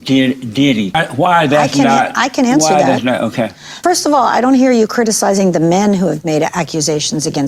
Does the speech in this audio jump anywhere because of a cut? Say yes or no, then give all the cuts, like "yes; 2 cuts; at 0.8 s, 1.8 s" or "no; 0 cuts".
yes; 2 cuts; at 1.0 s, 3.8 s